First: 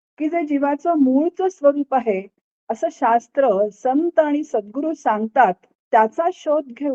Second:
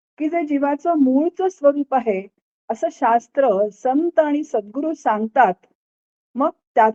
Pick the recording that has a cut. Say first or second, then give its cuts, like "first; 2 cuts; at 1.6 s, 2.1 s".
first; 1 cut; at 5.8 s